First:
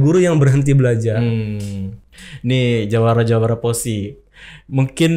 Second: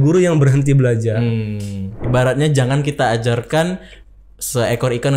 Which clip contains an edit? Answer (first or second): second